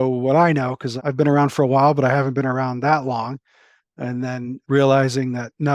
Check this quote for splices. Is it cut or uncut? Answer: cut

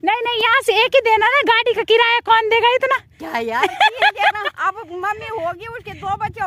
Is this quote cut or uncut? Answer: uncut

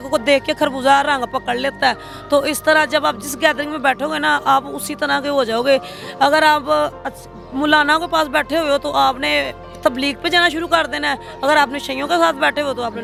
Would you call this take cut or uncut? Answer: uncut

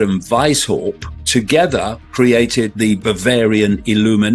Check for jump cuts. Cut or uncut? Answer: cut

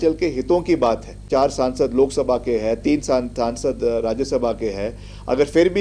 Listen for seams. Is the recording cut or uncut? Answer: cut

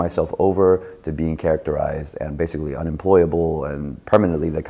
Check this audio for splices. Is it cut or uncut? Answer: uncut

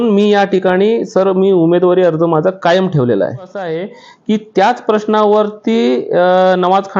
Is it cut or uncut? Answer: cut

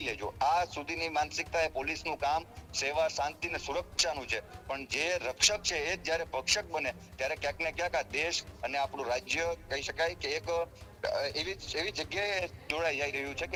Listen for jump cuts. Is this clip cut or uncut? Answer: uncut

